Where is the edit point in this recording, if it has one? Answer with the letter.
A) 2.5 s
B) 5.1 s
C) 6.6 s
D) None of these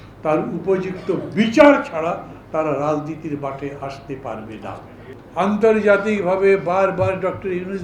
B